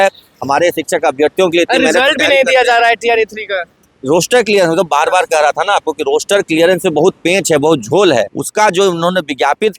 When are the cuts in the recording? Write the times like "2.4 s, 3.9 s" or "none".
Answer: 8.4 s